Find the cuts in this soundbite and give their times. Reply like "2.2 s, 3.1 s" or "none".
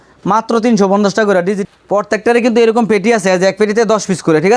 1.6 s